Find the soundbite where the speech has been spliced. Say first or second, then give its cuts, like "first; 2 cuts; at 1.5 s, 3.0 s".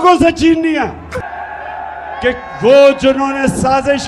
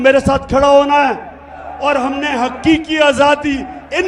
first; 1 cut; at 1.2 s